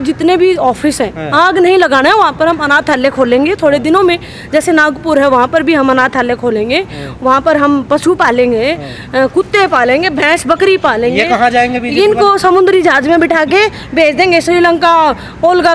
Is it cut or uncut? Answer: uncut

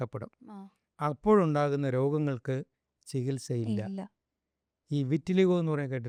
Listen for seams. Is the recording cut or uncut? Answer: uncut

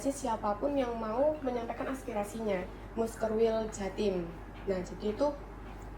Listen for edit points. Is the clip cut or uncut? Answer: cut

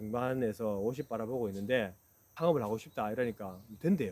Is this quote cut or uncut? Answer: cut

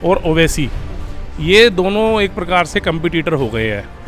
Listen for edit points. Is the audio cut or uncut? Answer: uncut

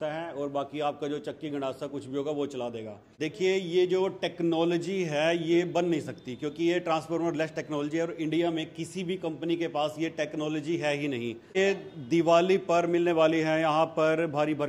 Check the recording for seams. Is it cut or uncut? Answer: cut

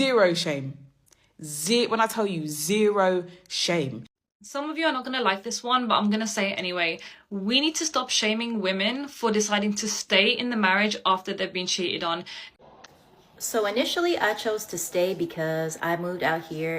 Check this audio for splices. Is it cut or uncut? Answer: cut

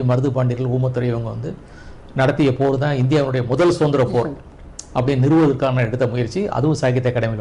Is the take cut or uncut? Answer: uncut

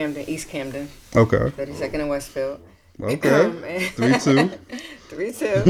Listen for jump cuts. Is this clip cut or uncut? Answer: uncut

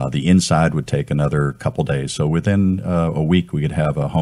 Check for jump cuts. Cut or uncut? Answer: uncut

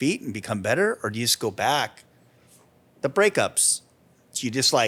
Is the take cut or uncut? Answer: uncut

